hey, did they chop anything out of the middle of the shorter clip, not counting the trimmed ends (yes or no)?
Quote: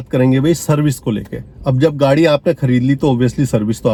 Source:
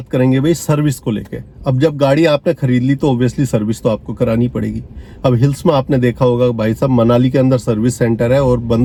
no